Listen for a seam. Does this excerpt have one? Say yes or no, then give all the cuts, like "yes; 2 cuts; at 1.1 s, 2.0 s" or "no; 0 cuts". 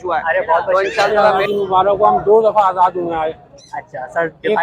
yes; 1 cut; at 1.4 s